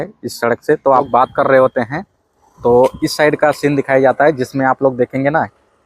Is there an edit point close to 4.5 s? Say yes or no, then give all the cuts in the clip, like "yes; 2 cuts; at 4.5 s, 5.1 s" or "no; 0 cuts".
no; 1 cut; at 1.1 s